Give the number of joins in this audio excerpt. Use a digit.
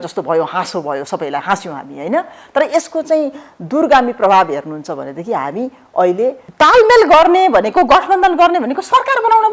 1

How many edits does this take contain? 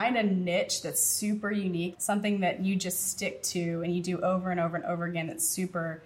1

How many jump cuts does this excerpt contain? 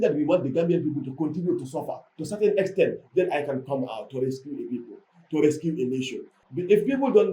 1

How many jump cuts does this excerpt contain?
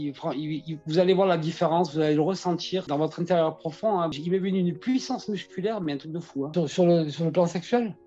3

